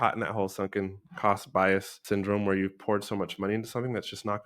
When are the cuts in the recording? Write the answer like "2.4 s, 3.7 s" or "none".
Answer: 1.9 s